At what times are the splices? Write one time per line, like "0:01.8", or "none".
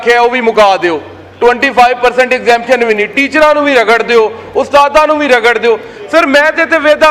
none